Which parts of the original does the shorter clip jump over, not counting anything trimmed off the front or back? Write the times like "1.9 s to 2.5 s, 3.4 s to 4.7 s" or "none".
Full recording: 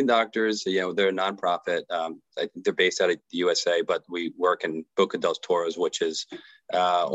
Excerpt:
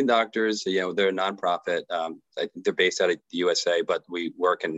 none